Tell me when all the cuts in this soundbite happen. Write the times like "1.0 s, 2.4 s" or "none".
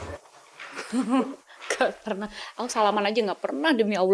none